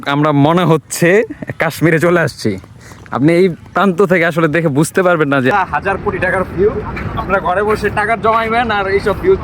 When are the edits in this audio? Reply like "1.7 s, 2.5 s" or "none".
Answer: 5.5 s